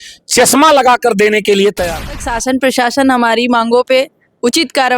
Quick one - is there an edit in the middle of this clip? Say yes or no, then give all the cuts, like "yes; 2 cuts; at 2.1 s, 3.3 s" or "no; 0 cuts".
yes; 1 cut; at 2.2 s